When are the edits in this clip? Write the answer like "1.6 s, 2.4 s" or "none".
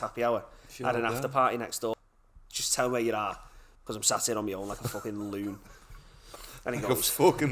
1.9 s